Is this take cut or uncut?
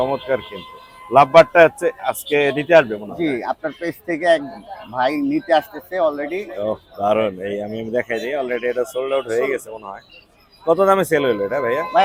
uncut